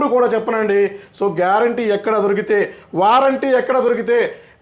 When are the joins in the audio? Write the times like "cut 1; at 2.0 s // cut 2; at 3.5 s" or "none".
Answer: none